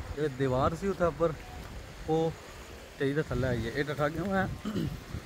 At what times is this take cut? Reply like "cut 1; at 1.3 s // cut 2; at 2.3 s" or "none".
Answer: none